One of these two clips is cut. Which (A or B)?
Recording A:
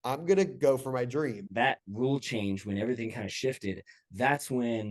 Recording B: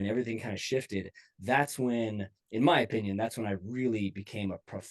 A